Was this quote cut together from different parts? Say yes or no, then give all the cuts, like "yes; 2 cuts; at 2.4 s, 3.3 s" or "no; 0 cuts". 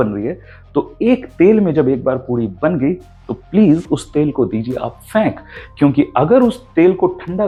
no; 0 cuts